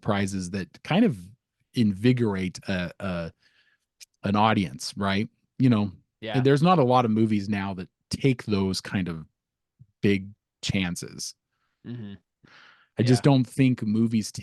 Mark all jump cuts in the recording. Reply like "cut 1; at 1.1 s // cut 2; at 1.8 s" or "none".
cut 1; at 12.4 s

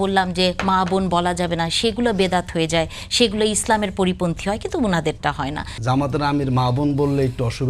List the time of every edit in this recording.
cut 1; at 5.7 s

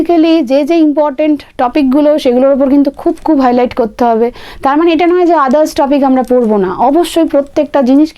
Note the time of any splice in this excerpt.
none

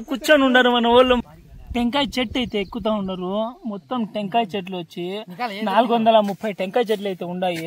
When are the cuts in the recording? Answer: cut 1; at 1.2 s

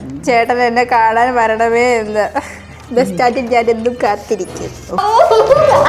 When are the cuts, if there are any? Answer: cut 1; at 5.0 s

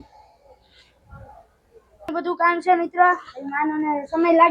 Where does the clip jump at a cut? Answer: cut 1; at 2.1 s

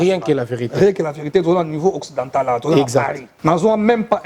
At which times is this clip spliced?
cut 1; at 3.3 s

